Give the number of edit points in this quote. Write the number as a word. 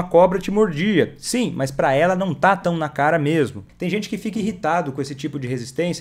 one